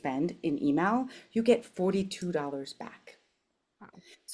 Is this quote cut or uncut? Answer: uncut